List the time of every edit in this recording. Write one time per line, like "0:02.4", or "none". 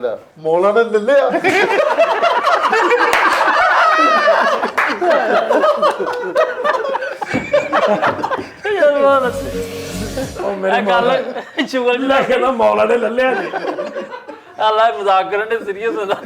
none

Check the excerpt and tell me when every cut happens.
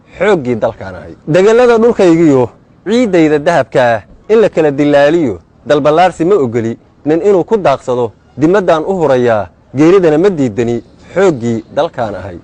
none

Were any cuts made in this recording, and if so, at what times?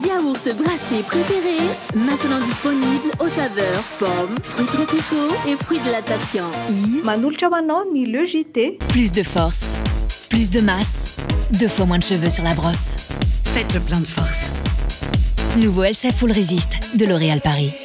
0:08.8

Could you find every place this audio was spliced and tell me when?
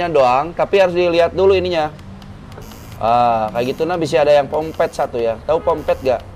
none

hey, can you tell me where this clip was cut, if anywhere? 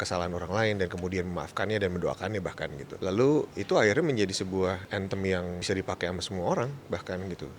0:02.8
0:03.5
0:04.8
0:05.6

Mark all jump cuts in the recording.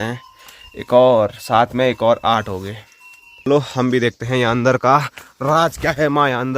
0:03.5

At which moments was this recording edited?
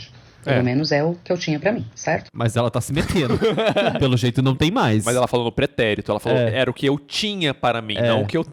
none

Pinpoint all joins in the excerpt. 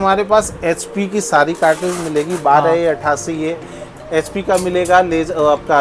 none

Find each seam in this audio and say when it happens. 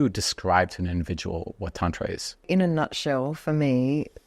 0:02.5

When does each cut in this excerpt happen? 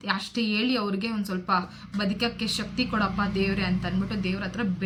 none

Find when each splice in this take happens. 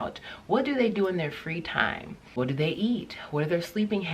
0:02.1

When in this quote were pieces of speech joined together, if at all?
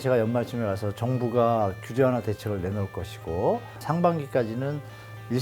0:03.7

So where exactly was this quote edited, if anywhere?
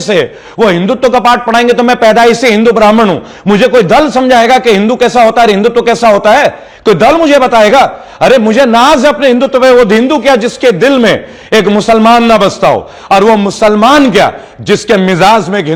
none

